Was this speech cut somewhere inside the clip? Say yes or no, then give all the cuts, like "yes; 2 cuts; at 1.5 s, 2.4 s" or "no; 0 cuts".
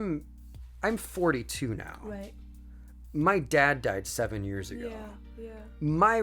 no; 0 cuts